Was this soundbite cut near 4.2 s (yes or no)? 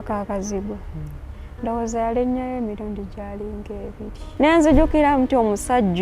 yes